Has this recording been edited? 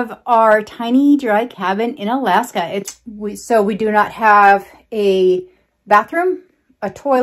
yes; 1 cut; at 2.9 s

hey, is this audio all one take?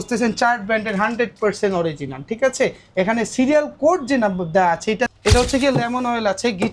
no; 1 cut; at 5.1 s

